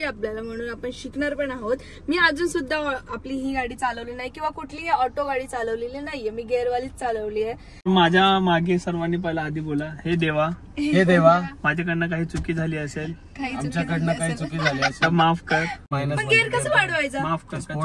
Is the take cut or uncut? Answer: cut